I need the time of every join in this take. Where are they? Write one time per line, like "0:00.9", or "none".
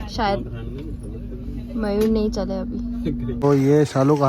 0:03.4